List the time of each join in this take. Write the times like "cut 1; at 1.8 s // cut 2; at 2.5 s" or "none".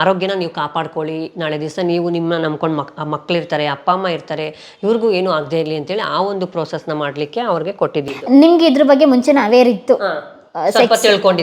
none